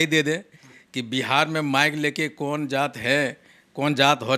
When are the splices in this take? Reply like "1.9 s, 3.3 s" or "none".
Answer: none